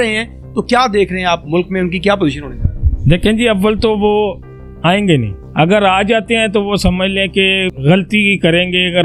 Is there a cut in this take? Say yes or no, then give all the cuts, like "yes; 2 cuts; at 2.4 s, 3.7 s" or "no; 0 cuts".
yes; 2 cuts; at 5.4 s, 7.7 s